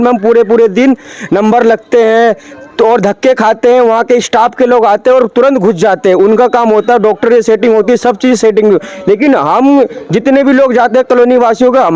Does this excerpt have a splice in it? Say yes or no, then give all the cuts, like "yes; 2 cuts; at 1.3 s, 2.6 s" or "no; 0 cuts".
no; 0 cuts